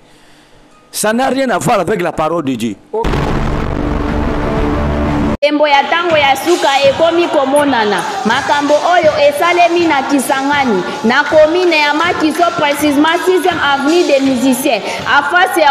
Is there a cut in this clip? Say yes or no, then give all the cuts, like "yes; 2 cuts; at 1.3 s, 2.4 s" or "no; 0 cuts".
yes; 1 cut; at 3.0 s